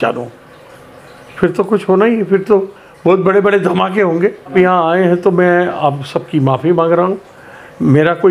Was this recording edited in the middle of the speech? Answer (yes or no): yes